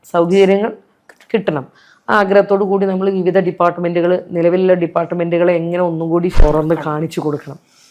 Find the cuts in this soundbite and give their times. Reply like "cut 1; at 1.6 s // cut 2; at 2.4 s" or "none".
cut 1; at 6.4 s